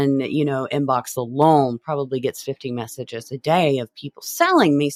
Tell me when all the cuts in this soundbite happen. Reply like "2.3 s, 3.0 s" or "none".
none